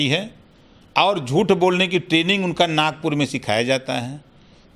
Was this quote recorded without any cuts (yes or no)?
yes